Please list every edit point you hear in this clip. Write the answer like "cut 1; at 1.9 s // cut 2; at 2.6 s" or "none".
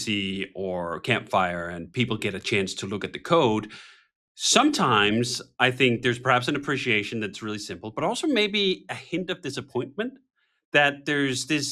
none